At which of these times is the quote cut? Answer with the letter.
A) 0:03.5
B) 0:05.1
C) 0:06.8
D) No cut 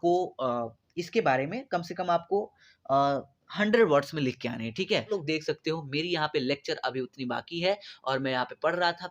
B